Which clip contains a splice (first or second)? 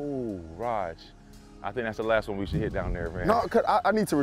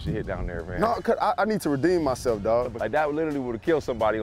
second